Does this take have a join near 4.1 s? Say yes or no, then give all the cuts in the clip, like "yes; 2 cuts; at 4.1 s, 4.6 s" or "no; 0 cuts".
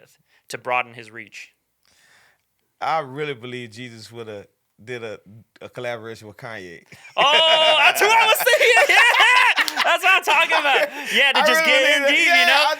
no; 1 cut; at 2.5 s